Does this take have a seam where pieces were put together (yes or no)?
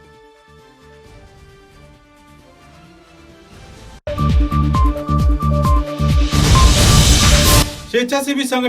yes